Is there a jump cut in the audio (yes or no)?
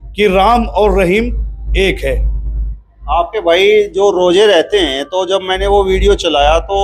no